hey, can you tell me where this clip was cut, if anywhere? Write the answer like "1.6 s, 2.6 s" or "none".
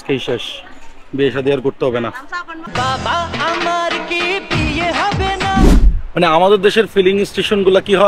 5.7 s